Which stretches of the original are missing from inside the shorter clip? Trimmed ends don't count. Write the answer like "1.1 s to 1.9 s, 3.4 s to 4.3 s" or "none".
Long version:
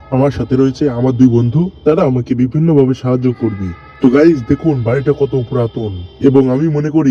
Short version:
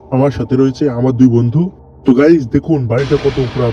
1.7 s to 3.7 s